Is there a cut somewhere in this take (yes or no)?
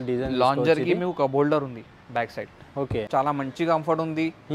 yes